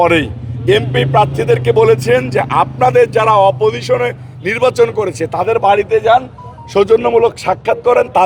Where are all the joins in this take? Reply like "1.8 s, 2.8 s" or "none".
none